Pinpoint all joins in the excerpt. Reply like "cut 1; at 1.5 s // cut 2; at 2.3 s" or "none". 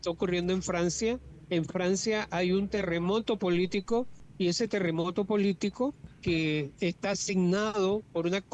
cut 1; at 1.3 s // cut 2; at 4.2 s // cut 3; at 6.1 s